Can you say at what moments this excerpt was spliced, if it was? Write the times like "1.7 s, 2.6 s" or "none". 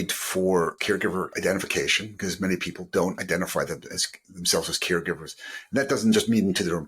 0.9 s